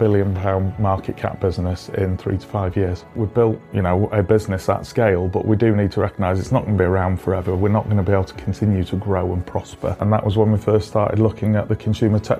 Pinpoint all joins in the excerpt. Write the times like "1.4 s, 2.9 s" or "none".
3.2 s, 10.0 s